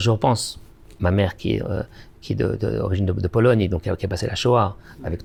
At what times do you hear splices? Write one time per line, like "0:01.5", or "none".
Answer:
none